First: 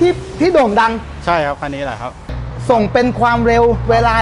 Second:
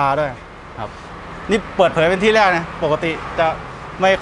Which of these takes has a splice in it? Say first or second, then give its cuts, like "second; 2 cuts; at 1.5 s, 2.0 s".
first; 1 cut; at 2.4 s